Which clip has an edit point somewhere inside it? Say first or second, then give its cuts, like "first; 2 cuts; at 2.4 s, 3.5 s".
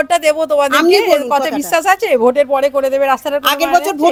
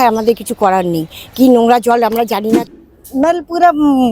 second; 1 cut; at 2.7 s